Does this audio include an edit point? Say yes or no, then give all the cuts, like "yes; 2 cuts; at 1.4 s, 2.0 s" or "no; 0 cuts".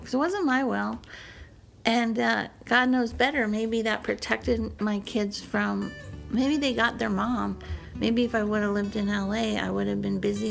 no; 0 cuts